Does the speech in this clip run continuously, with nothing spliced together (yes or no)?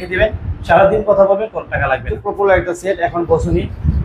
no